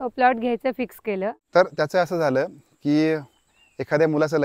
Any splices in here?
yes; 1 cut; at 1.4 s

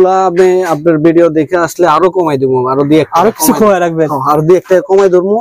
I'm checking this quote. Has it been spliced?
no; 0 cuts

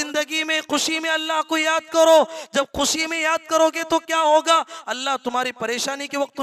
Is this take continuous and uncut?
yes; 0 cuts

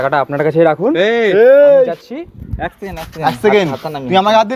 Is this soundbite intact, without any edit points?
yes; 0 cuts

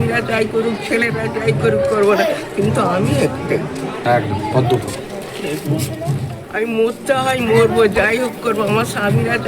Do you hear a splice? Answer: yes; 1 cut; at 6.4 s

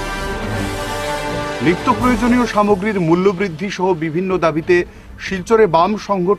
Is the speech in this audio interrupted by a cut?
no; 0 cuts

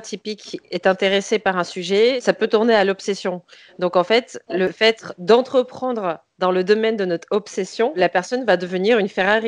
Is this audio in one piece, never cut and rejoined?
no; 3 cuts; at 2.2 s, 4.8 s, 8.0 s

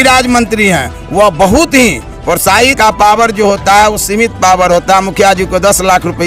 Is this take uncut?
no; 1 cut; at 2.8 s

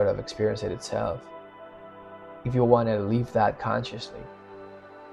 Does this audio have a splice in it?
no; 0 cuts

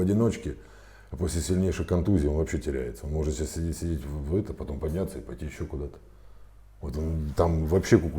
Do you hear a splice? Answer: no; 0 cuts

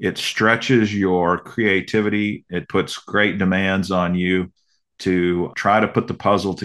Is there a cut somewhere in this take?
yes; 2 cuts; at 2.5 s, 5.5 s

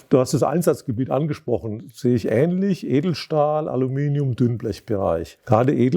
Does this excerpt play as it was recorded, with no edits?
yes; 0 cuts

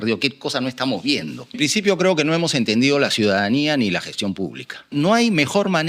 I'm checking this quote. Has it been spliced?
yes; 2 cuts; at 1.6 s, 4.9 s

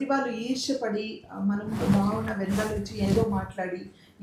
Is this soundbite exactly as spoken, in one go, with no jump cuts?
yes; 0 cuts

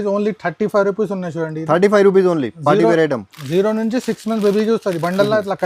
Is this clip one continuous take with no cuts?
yes; 0 cuts

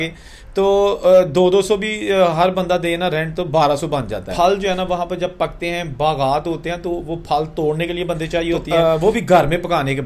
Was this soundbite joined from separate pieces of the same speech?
yes; 2 cuts; at 4.3 s, 8.6 s

